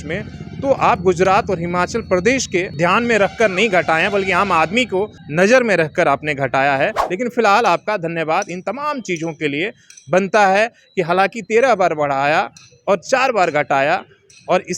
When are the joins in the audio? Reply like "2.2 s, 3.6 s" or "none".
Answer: 2.7 s, 5.2 s, 7.0 s